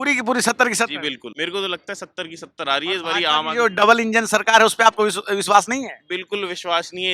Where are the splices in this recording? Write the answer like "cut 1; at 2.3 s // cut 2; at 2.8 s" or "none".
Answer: cut 1; at 1.3 s